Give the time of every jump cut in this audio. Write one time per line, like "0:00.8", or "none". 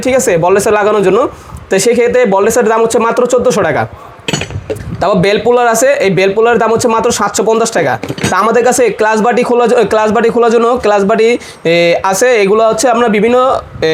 none